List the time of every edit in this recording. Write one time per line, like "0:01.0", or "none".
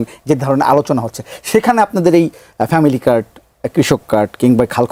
none